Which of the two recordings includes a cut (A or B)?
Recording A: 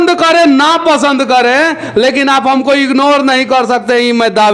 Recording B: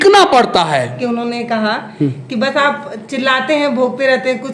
B